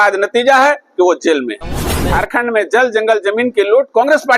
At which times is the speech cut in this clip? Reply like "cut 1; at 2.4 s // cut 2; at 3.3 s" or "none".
cut 1; at 1.9 s